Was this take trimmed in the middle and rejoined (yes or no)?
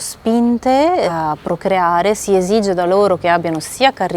yes